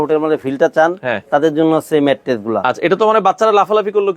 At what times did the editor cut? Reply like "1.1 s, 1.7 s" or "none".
none